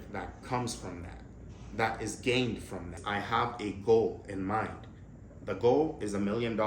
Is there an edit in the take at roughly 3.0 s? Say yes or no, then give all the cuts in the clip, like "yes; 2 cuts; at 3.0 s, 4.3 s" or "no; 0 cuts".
yes; 1 cut; at 3.0 s